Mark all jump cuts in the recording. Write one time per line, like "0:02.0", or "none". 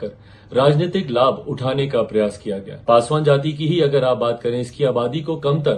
0:02.7